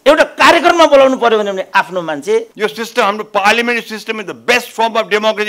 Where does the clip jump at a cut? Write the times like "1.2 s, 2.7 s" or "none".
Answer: 2.5 s